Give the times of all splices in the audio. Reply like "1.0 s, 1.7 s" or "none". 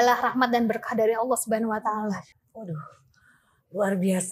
2.4 s

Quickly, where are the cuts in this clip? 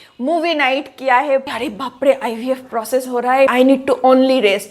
1.5 s, 3.5 s

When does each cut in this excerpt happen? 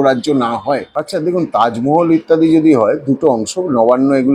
1.0 s

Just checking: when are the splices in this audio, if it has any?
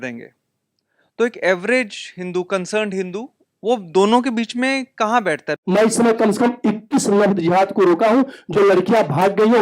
5.6 s

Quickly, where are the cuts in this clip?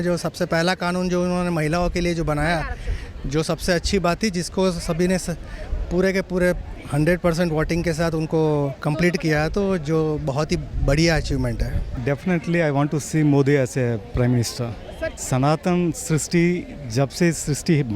11.9 s, 15.1 s

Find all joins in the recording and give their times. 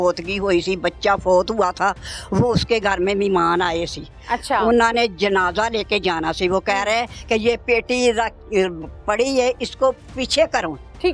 none

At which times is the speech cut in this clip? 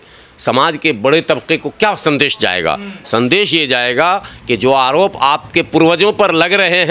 none

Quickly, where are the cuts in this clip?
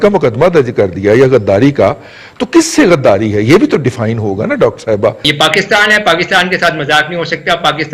5.2 s

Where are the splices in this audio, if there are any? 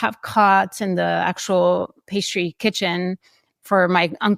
none

